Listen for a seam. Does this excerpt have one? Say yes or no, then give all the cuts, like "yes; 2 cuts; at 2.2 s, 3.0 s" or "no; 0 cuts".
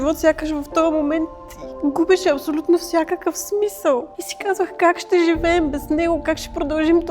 yes; 1 cut; at 4.2 s